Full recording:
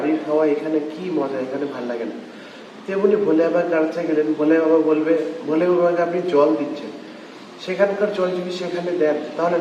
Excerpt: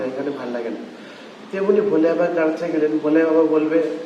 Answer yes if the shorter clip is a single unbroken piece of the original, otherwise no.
yes